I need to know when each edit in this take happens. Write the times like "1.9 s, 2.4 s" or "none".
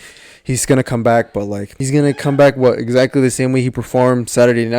1.7 s